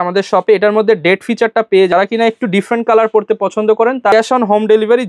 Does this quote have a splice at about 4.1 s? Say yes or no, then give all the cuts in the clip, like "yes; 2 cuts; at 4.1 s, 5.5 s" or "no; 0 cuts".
yes; 2 cuts; at 1.9 s, 4.1 s